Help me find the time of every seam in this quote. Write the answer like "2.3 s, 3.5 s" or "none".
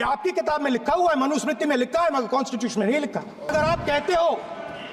3.5 s